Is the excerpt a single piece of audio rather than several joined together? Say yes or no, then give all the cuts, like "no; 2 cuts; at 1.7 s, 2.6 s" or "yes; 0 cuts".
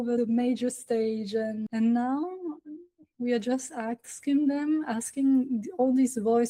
yes; 0 cuts